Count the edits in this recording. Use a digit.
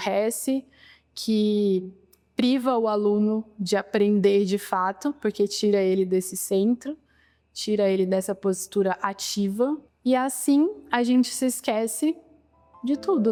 0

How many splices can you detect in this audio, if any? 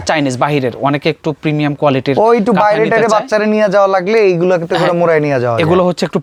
0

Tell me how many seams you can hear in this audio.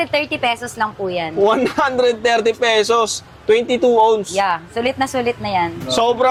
0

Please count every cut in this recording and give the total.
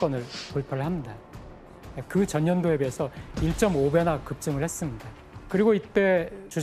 0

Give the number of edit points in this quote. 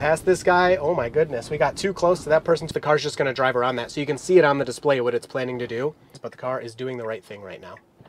2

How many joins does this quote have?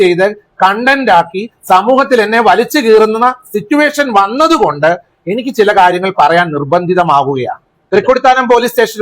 1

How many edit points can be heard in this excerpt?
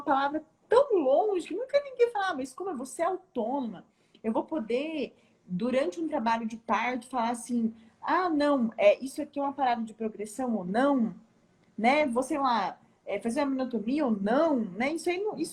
0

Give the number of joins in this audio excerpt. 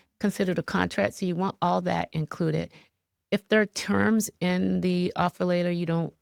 0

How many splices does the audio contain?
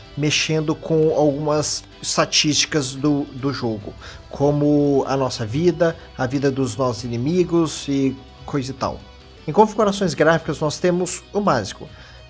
1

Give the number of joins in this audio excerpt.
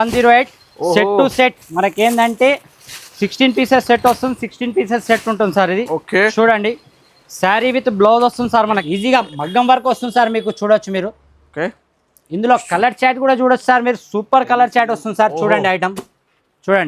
1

